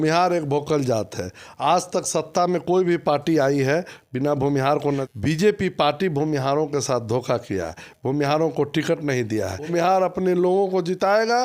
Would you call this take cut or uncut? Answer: cut